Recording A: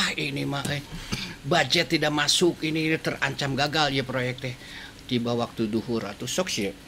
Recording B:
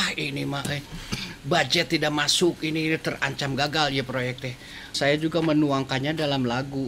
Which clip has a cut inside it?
B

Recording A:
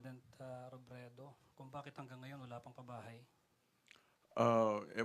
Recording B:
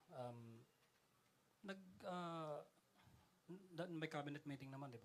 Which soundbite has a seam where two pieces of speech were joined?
A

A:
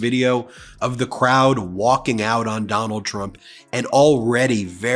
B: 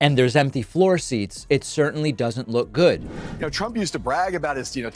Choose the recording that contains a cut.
B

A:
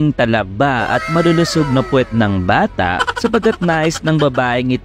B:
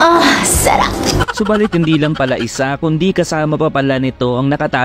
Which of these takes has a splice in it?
B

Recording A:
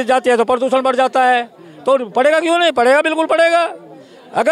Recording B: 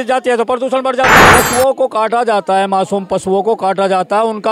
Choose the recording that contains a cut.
B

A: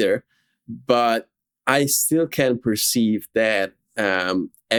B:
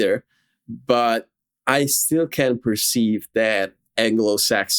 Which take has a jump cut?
B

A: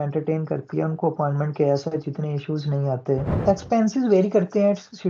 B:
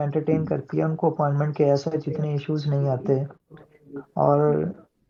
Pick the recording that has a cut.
A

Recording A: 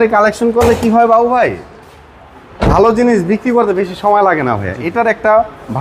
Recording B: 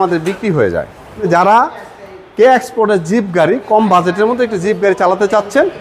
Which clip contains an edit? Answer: B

